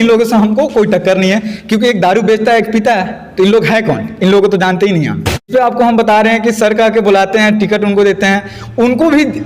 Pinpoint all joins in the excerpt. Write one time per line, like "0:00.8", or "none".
0:05.4